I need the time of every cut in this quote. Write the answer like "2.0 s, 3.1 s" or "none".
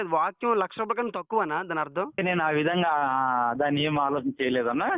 2.2 s